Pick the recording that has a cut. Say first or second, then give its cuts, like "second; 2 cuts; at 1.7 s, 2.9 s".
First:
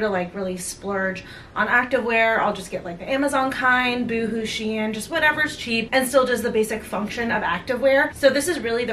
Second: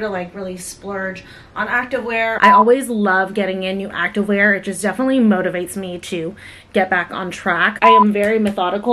second; 2 cuts; at 2.4 s, 7.8 s